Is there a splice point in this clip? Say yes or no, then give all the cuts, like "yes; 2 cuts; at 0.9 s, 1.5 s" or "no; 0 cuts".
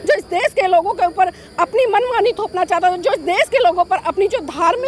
no; 0 cuts